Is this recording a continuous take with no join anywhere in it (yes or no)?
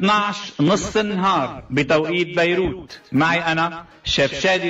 yes